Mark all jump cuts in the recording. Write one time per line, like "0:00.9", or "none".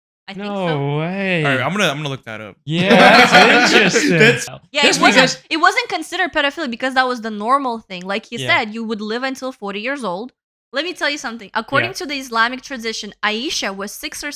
0:04.5
0:10.4